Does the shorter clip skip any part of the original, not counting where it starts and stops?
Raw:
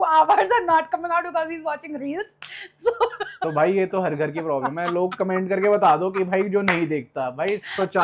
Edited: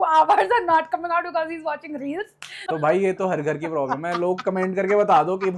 yes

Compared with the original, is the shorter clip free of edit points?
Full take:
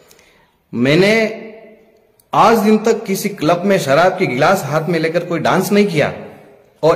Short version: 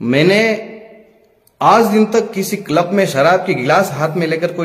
yes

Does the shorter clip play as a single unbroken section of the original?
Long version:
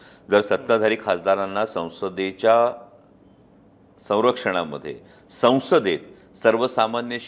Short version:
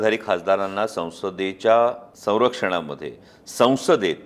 no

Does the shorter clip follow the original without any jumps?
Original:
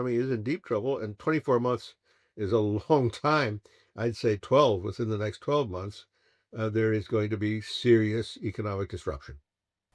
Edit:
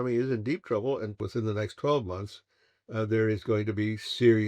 no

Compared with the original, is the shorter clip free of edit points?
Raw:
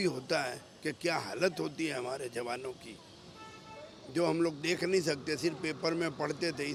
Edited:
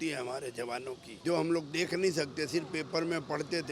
no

